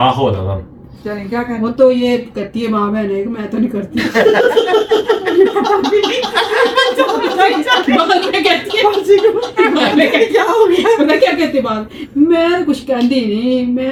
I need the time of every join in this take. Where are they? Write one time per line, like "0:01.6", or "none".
none